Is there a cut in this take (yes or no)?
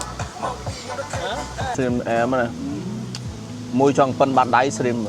yes